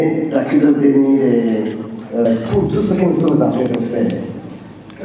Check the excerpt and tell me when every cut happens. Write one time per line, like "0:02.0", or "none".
0:02.3